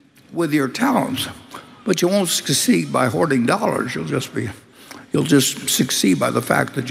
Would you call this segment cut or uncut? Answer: uncut